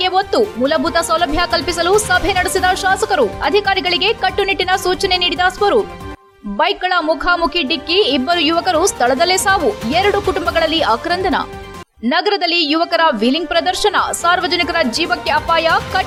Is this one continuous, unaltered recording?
yes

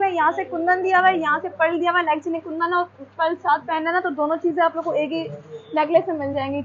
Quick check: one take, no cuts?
yes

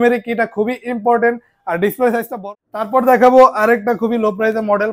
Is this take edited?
yes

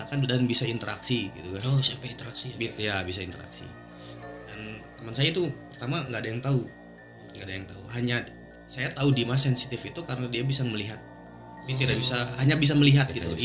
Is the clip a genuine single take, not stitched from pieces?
yes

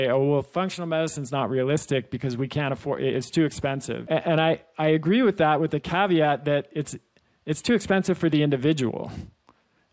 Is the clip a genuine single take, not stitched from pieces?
no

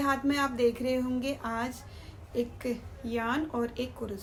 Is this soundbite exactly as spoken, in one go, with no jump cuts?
yes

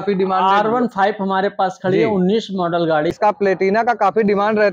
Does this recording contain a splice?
yes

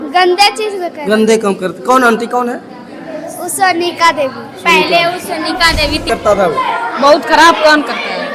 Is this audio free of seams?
no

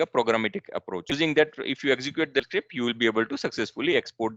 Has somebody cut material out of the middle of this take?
yes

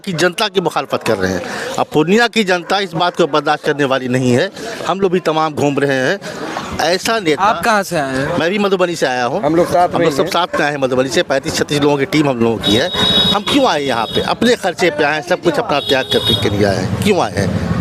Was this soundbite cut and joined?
no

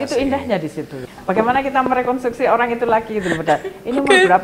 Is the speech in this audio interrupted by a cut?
yes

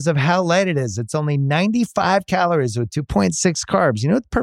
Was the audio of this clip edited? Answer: no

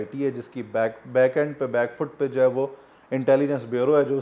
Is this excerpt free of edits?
yes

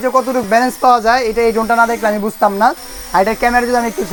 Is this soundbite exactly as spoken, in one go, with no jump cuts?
yes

